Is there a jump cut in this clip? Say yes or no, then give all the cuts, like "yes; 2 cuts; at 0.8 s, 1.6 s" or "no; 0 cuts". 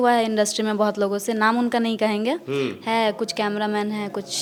no; 0 cuts